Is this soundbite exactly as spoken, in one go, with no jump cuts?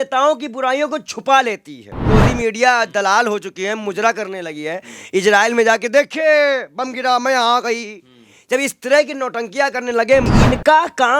no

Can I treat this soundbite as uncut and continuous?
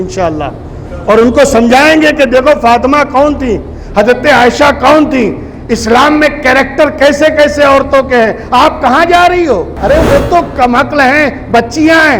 no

